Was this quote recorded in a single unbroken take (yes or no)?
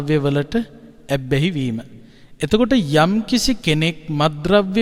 yes